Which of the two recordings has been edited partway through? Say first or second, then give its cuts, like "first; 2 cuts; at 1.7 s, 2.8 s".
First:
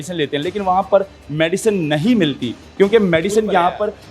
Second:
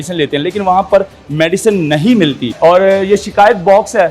second; 1 cut; at 2.5 s